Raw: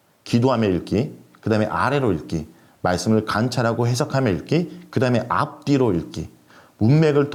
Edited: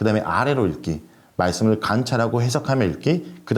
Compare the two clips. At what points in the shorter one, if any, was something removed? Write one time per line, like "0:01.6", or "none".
none